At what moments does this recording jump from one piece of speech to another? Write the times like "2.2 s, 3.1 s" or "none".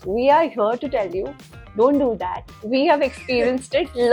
none